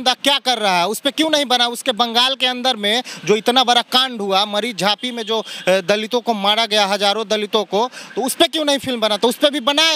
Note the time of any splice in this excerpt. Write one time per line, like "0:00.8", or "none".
none